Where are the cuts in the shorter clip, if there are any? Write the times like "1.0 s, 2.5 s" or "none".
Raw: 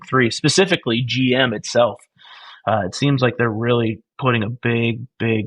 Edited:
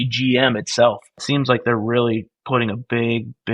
1.2 s